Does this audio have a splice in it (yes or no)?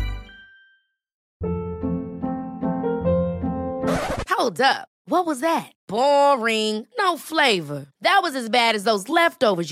yes